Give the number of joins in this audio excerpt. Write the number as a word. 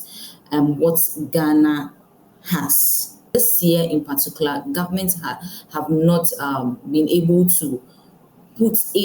one